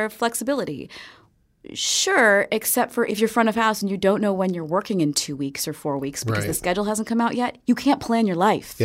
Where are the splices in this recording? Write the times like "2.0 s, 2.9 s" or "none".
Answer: 3.1 s